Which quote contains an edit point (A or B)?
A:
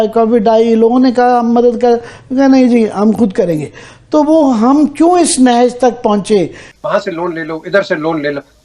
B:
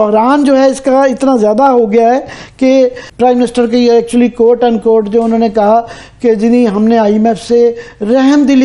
A